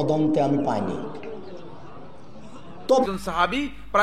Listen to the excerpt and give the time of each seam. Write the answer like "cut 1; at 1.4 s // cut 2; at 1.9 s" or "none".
cut 1; at 3.1 s